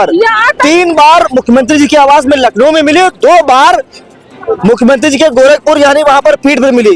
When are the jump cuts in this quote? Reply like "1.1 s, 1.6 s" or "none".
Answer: none